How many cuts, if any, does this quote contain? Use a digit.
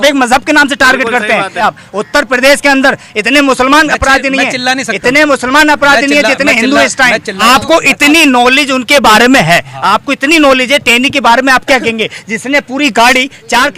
2